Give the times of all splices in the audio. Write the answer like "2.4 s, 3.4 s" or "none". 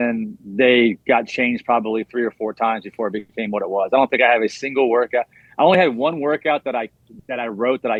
none